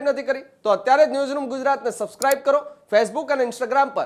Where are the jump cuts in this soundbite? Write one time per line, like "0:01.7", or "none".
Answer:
none